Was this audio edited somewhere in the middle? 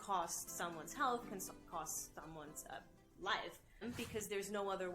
yes; 1 cut; at 3.8 s

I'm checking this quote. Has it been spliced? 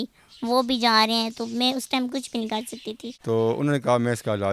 yes; 1 cut; at 3.1 s

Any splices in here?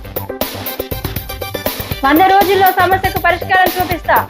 yes; 1 cut; at 1.9 s

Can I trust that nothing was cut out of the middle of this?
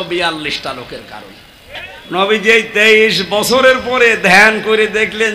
no; 1 cut; at 1.9 s

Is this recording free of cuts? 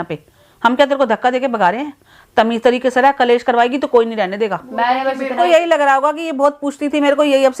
no; 1 cut; at 5.3 s

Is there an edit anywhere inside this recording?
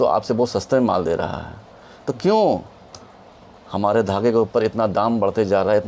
no; 0 cuts

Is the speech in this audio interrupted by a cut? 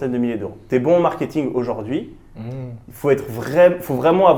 no; 0 cuts

